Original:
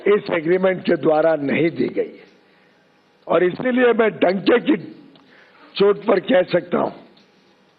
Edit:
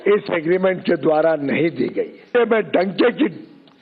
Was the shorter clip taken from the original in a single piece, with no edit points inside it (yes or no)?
no